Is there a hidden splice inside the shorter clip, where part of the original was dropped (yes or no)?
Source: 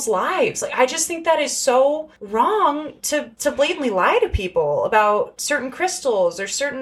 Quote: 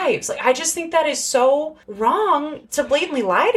yes